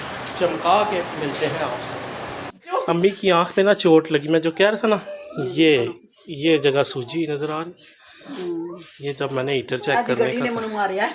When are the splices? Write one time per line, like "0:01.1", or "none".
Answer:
0:02.5